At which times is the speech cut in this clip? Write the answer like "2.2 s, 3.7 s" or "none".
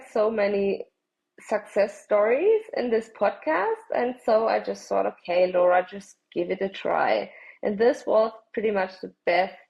none

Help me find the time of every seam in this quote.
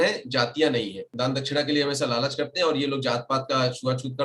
1.1 s

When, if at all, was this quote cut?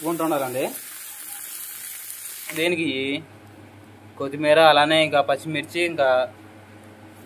2.6 s

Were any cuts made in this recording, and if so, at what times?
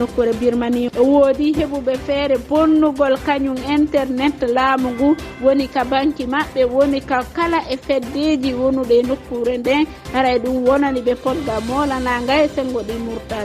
0.9 s

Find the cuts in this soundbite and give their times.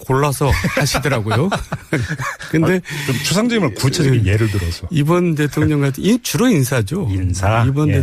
2.3 s

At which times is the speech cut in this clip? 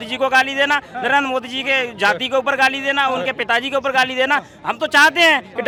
none

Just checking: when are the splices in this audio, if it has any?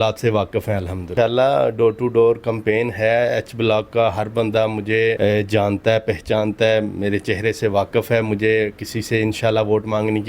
1.1 s, 5.2 s

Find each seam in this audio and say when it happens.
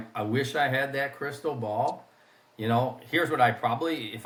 none

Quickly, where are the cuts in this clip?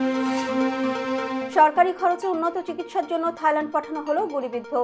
1.5 s

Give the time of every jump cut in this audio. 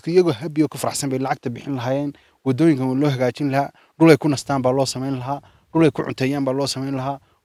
none

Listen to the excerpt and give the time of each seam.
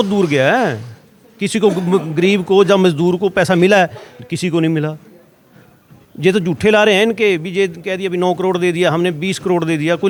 none

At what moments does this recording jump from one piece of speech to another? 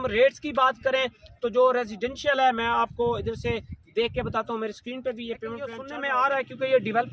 5.8 s

